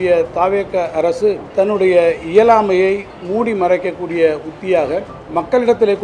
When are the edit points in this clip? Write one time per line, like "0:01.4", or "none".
0:01.4
0:05.2

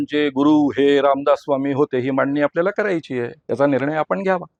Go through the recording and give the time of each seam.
none

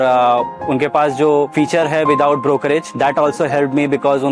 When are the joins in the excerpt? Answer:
0:01.5
0:02.9

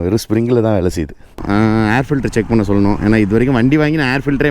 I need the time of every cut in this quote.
0:01.4

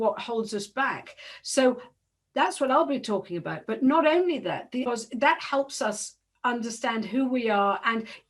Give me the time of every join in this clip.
0:04.9

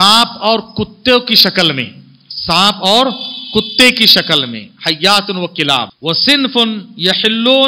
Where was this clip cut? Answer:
0:05.9

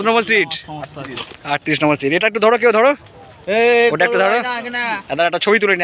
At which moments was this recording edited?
none

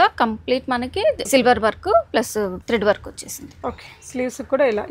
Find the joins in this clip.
0:01.2
0:02.6

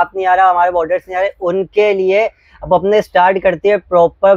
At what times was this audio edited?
none

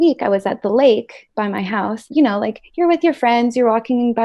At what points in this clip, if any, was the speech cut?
0:02.1

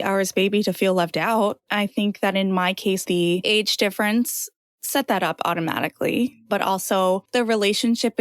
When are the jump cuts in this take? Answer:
0:01.6
0:03.0
0:07.2

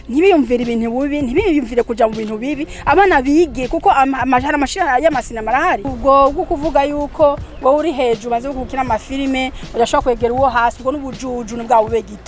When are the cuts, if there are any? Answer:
0:05.9

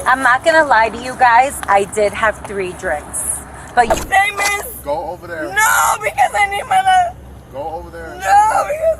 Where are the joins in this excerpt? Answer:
0:03.9

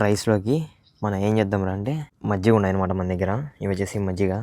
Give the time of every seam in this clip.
0:02.1

